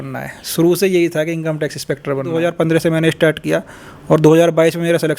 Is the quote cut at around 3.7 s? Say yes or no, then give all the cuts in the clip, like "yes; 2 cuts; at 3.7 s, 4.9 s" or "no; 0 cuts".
no; 1 cut; at 2.4 s